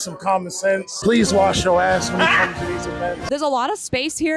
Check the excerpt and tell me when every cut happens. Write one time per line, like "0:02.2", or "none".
0:00.9
0:03.2